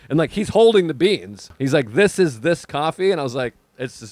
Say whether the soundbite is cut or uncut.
cut